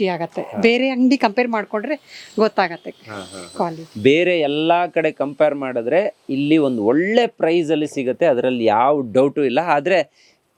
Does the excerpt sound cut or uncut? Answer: uncut